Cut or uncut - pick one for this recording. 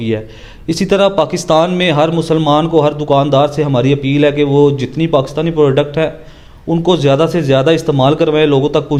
uncut